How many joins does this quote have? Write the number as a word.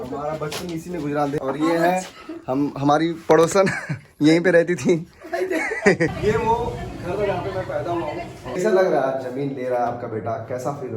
three